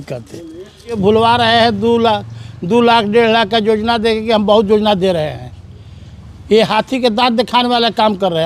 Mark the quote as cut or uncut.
cut